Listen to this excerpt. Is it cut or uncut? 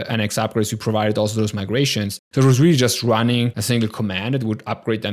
cut